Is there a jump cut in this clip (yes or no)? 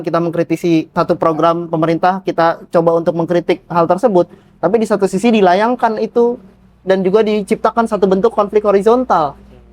no